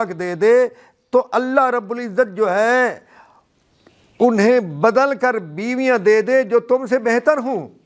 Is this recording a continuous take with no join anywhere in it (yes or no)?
yes